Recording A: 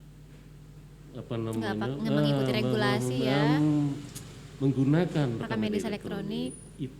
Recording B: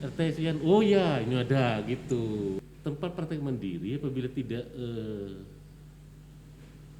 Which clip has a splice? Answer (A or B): B